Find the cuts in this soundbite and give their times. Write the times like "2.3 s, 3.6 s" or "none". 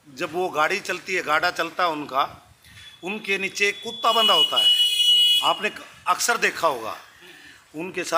none